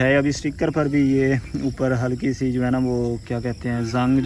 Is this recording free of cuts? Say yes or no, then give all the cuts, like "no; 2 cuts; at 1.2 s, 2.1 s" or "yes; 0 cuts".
yes; 0 cuts